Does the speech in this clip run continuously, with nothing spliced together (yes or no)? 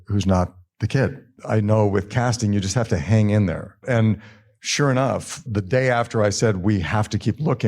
no